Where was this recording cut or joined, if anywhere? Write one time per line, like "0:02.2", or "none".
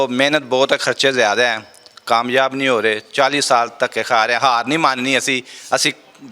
none